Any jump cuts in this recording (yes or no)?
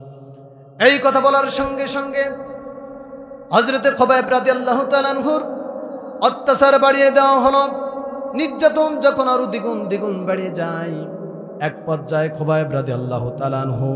no